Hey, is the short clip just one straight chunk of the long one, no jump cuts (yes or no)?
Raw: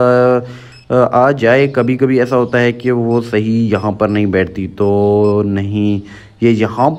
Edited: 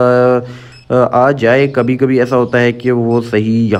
yes